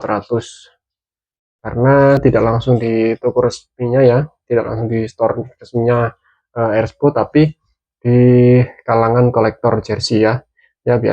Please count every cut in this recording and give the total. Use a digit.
1